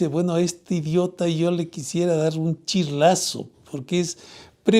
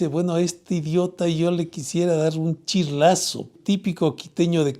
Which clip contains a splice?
second; 1 cut; at 3.5 s

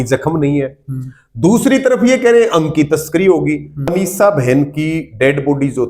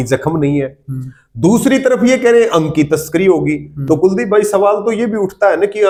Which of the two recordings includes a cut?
first; 1 cut; at 3.9 s

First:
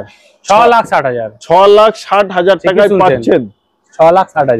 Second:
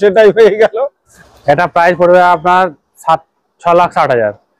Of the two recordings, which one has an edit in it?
second; 1 cut; at 1.2 s

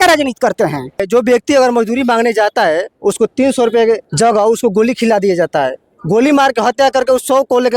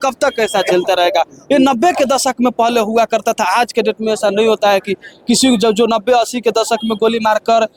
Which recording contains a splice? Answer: first; 2 cuts; at 1.0 s, 4.1 s

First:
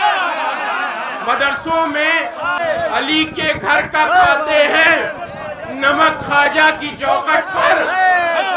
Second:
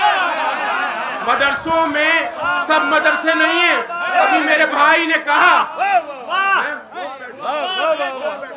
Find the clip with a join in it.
first; 1 cut; at 2.6 s

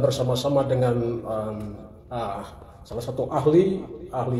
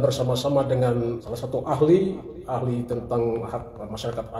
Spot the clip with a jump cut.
second; 1 cut; at 1.2 s

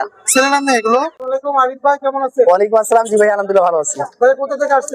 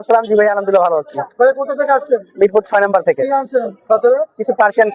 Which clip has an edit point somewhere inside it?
first; 1 cut; at 1.2 s

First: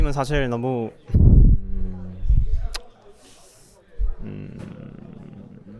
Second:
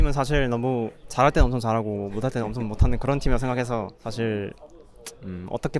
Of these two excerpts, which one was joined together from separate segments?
second; 2 cuts; at 1.0 s, 4.0 s

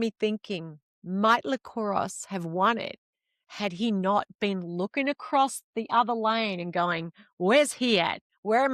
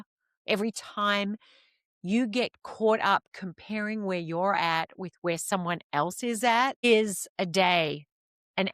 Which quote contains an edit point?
second; 1 cut; at 6.8 s

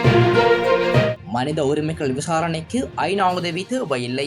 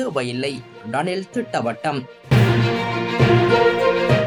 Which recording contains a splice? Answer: first; 1 cut; at 1.1 s

